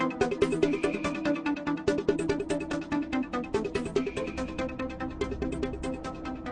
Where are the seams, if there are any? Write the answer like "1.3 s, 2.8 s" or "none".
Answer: 4.5 s